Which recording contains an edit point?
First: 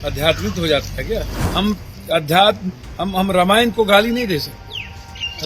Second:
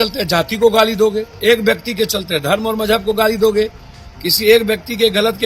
first; 1 cut; at 1.4 s

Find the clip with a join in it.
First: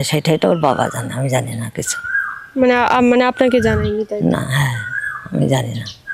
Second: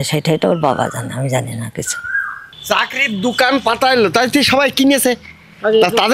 second; 1 cut; at 2.4 s

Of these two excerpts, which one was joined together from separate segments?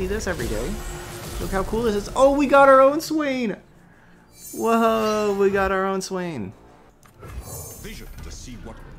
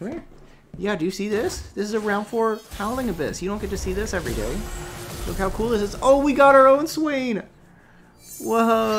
first; 1 cut; at 6.9 s

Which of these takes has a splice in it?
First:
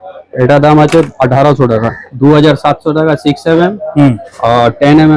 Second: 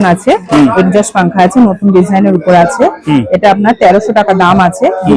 first; 1 cut; at 2.1 s

